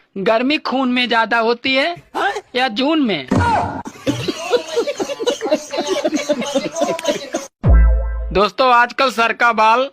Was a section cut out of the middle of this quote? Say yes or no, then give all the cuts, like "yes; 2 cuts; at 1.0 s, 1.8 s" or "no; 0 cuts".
yes; 1 cut; at 7.5 s